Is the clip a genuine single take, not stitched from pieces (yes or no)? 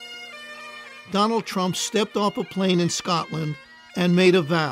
no